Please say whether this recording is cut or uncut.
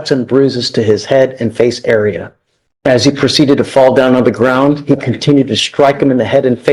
uncut